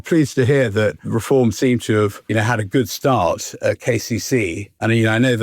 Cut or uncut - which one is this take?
cut